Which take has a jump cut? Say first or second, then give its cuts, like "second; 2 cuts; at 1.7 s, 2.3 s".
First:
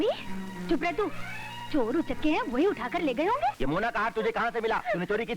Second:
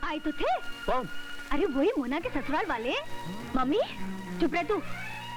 first; 1 cut; at 3.6 s